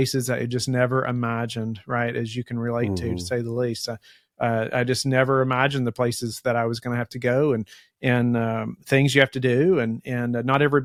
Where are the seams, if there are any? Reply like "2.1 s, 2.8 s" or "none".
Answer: none